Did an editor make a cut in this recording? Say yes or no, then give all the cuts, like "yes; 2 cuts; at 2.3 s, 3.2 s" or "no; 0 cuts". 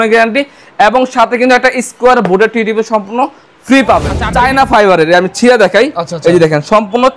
yes; 1 cut; at 4.2 s